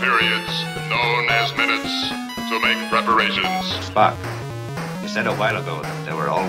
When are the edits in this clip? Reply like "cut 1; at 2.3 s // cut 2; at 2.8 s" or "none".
none